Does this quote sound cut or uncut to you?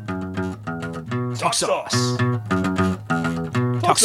uncut